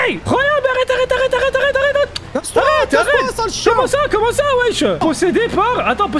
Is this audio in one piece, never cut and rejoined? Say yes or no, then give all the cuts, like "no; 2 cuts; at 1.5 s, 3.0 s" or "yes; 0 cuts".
no; 1 cut; at 5.0 s